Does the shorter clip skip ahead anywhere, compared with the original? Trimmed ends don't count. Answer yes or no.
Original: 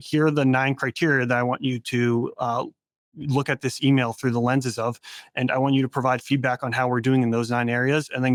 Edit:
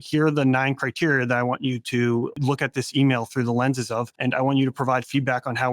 yes